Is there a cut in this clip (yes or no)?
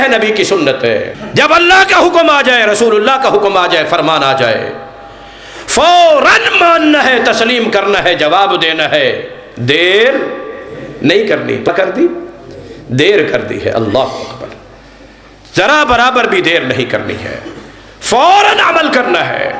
yes